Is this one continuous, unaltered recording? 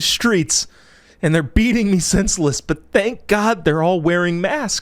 yes; 0 cuts

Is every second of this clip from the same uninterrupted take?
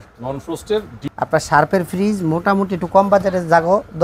no; 1 cut; at 1.0 s

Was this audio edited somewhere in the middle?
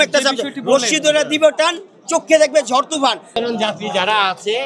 yes; 1 cut; at 3.3 s

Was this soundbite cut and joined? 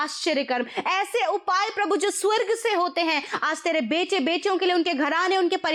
no; 0 cuts

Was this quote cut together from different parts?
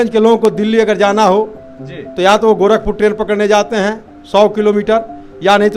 no; 0 cuts

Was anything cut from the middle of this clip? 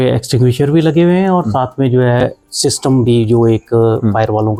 no; 0 cuts

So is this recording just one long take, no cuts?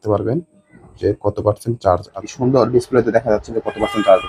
no; 1 cut; at 2.2 s

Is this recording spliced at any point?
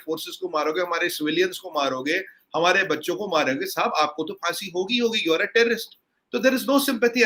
no; 0 cuts

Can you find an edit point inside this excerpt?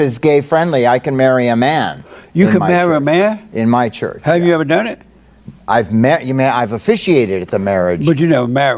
no; 0 cuts

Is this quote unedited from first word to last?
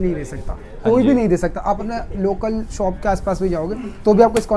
yes; 0 cuts

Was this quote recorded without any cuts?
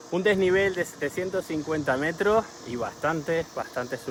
yes; 0 cuts

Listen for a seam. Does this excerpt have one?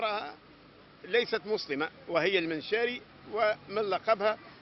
no; 0 cuts

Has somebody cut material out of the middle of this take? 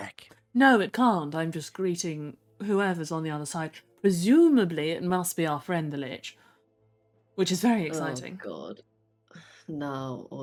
no; 0 cuts

